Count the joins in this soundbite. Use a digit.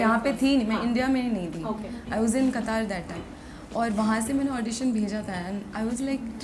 0